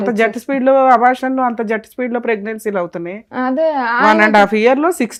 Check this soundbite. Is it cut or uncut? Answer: uncut